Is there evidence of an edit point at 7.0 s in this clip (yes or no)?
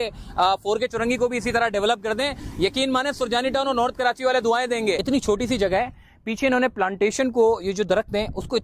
no